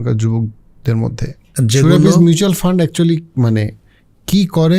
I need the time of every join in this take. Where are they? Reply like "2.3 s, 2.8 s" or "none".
1.5 s